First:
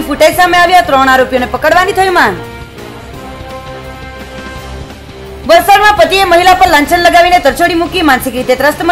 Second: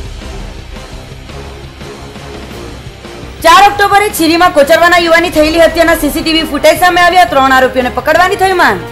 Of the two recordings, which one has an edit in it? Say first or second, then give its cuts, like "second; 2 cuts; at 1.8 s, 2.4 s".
second; 1 cut; at 3.3 s